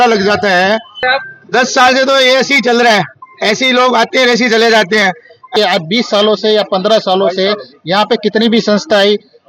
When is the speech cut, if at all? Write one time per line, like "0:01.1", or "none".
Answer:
0:01.1
0:05.5